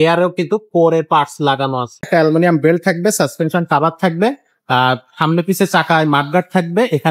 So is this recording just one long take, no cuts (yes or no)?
no